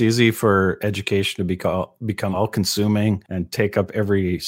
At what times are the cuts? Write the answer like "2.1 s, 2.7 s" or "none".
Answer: 3.4 s